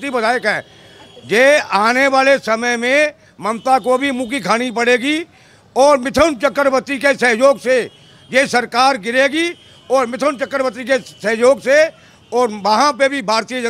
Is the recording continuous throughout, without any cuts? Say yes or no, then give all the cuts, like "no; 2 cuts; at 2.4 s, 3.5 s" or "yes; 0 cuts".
yes; 0 cuts